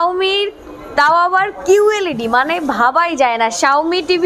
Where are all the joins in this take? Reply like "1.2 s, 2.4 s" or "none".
none